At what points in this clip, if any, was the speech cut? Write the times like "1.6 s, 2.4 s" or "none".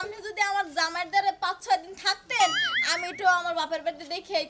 none